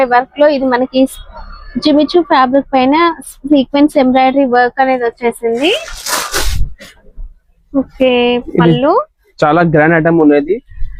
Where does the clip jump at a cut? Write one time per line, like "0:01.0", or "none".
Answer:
none